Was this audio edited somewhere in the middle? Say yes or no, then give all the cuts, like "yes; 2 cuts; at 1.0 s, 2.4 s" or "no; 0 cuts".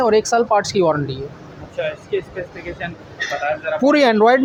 no; 0 cuts